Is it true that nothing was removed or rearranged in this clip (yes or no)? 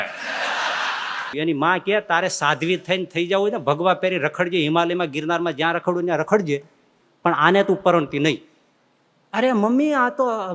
no